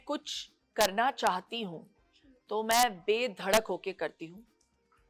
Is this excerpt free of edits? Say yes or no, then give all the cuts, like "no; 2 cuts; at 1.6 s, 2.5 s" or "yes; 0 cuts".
yes; 0 cuts